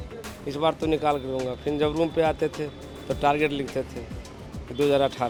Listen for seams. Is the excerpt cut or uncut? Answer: uncut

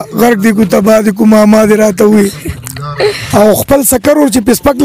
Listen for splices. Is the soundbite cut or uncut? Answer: cut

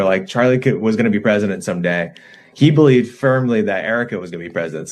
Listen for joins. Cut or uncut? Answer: uncut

